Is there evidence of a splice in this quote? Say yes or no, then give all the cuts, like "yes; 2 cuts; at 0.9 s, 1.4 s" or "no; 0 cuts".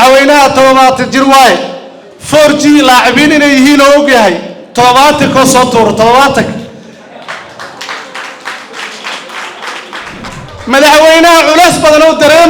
yes; 1 cut; at 10.3 s